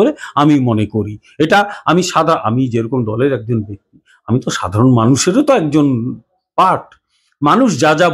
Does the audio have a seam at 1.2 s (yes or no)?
no